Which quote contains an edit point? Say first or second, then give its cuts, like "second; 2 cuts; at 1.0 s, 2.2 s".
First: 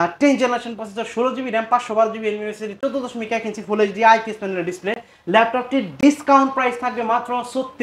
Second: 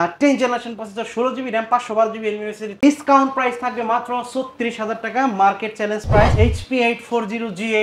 second; 2 cuts; at 2.7 s, 6.3 s